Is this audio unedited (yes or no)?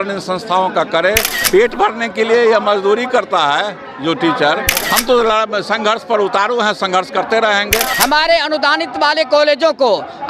no